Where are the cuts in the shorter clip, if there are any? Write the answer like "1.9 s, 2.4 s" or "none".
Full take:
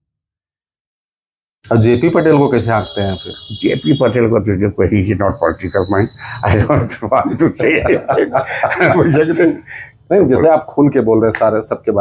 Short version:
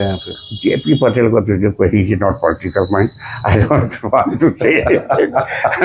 none